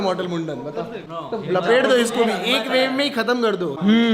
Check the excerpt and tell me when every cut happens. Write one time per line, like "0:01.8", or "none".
none